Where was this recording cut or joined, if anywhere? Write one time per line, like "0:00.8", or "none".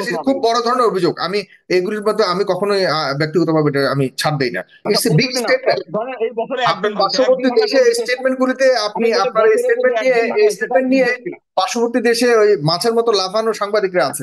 0:04.8